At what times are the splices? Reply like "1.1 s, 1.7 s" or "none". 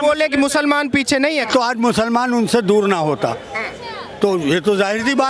1.4 s